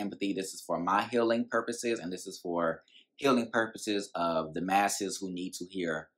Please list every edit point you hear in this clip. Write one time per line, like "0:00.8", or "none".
none